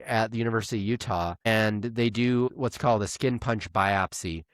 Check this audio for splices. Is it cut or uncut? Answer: cut